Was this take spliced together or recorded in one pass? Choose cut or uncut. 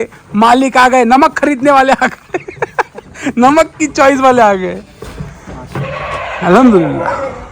uncut